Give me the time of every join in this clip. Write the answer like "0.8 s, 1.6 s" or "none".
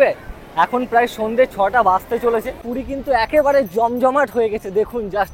2.7 s